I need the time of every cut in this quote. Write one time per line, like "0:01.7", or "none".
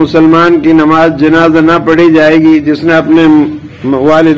none